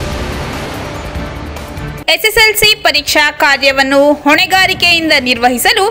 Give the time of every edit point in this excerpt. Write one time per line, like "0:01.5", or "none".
0:01.5